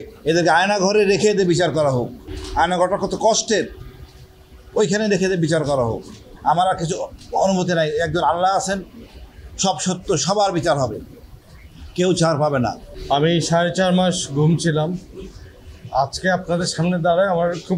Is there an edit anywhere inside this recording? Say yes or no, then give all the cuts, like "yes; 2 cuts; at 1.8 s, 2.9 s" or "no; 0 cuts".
no; 0 cuts